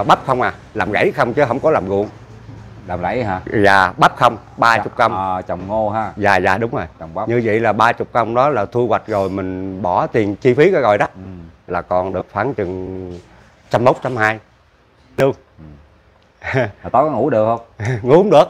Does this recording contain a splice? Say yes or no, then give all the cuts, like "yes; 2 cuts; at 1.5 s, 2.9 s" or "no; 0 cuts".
yes; 1 cut; at 15.2 s